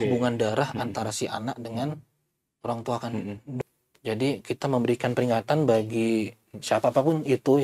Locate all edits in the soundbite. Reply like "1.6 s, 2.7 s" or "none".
3.6 s